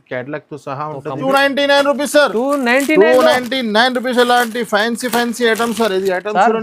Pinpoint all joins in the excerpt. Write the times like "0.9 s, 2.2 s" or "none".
1.2 s

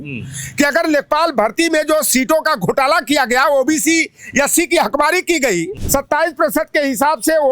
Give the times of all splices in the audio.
5.8 s

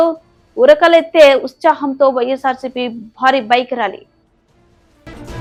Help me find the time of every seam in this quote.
none

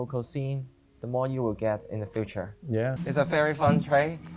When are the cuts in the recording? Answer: 2.9 s

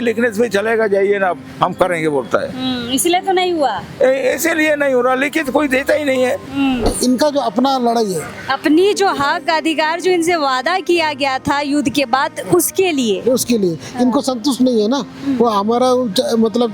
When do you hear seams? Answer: 6.9 s

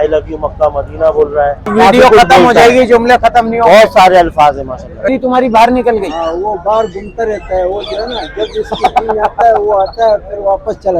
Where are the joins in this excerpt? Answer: 1.7 s, 5.2 s

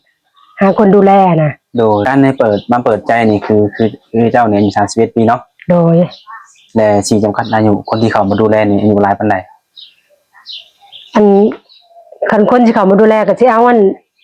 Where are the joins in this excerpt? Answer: 2.0 s

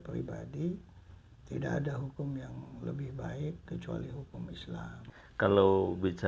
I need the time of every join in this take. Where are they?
5.1 s

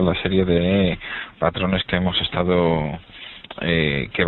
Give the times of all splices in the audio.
1.0 s

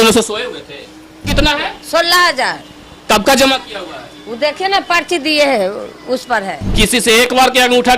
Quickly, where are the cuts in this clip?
1.3 s, 6.6 s

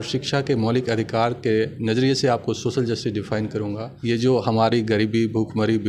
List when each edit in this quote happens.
3.9 s

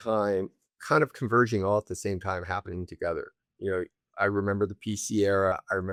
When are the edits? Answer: none

